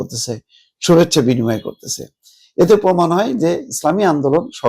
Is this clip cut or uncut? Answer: uncut